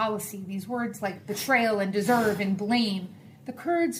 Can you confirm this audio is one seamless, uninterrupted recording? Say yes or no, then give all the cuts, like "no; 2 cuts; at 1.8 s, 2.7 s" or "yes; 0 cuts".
yes; 0 cuts